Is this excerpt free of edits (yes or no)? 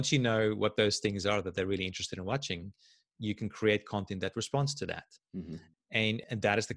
yes